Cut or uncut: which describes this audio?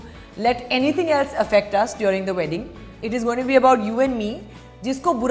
uncut